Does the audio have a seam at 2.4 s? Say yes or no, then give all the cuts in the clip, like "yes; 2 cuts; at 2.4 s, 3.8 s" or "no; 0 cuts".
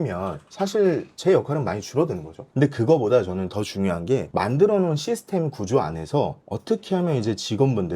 yes; 1 cut; at 2.4 s